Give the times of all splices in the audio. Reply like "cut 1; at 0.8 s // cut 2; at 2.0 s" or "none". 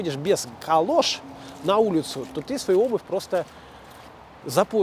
none